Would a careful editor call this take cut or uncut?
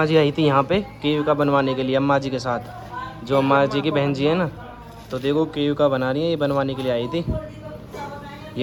uncut